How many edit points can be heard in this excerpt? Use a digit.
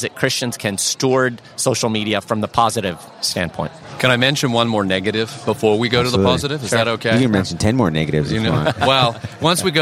1